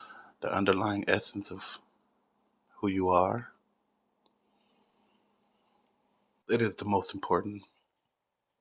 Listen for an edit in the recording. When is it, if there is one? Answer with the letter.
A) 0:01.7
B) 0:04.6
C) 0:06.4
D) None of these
C